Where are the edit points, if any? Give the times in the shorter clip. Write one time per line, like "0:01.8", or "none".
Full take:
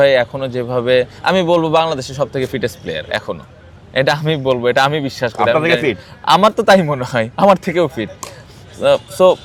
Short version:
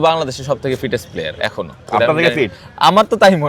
0:01.9